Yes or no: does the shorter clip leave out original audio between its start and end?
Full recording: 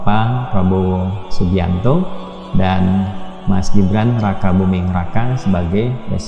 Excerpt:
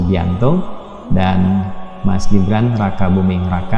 no